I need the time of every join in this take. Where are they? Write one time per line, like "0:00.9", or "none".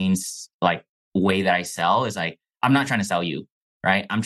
none